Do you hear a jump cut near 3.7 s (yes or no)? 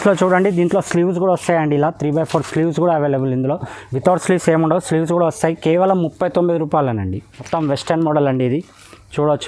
no